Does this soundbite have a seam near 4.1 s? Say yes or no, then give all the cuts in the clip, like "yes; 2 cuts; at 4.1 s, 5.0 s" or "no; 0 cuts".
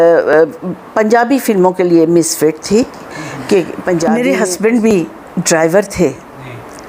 yes; 1 cut; at 4.1 s